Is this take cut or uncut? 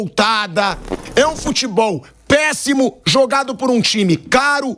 cut